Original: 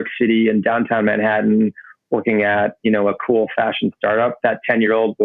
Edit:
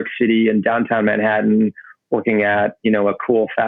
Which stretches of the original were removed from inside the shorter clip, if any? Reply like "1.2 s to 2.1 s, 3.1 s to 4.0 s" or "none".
none